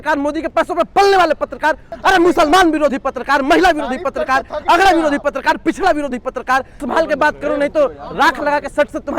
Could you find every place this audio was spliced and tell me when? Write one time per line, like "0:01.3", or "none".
0:01.9
0:06.8